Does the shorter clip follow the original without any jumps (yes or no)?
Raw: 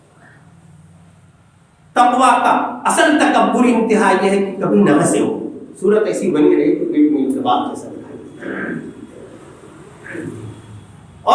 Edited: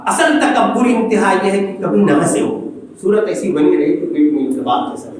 yes